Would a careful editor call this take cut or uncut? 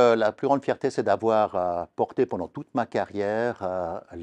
uncut